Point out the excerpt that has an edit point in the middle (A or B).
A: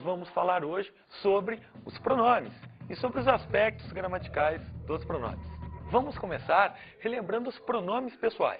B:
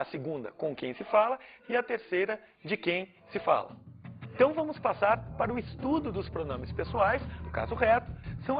B